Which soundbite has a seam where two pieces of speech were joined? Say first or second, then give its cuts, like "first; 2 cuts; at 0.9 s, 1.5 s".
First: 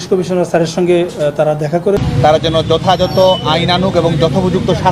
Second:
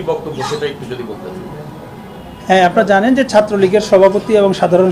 first; 1 cut; at 2.0 s